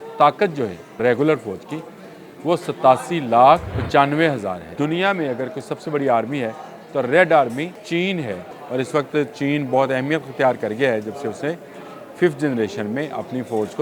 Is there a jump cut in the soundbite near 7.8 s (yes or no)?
yes